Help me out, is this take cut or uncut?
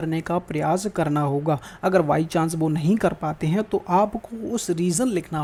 uncut